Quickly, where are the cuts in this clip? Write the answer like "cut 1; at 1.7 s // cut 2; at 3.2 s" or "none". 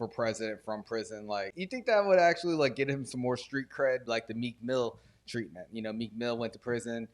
cut 1; at 1.6 s // cut 2; at 4.0 s